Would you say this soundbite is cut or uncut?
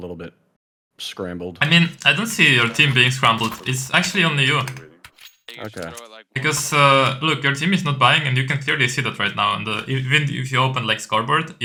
uncut